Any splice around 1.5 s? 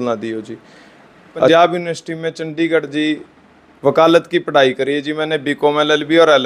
yes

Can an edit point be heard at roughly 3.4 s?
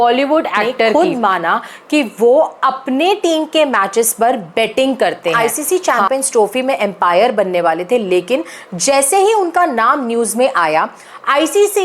no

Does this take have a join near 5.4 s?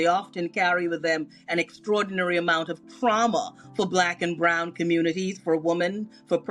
no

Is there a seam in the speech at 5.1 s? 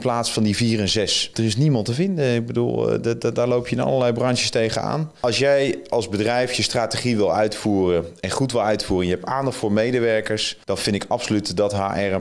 yes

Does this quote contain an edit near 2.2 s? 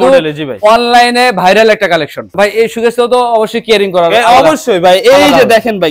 yes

